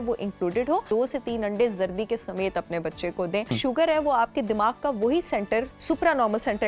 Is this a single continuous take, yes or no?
no